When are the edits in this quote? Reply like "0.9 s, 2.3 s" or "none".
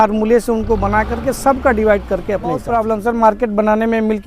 2.7 s